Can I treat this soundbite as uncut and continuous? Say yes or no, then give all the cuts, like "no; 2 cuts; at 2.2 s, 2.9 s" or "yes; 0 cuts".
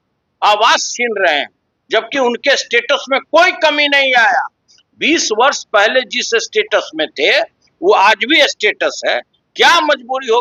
yes; 0 cuts